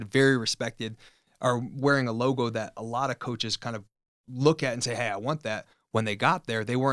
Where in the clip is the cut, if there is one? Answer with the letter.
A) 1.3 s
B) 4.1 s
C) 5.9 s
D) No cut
B